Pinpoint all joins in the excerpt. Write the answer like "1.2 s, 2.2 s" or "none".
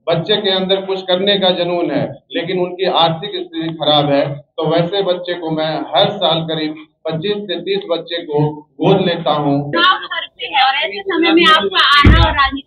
9.7 s

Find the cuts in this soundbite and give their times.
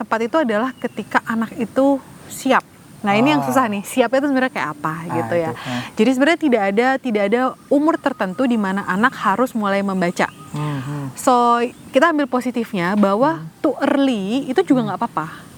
none

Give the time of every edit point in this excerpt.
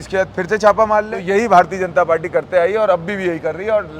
1.1 s

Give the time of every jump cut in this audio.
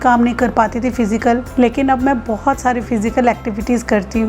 1.5 s

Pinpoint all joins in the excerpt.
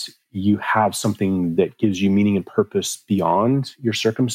none

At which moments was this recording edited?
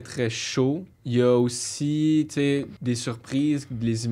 0.9 s, 2.7 s

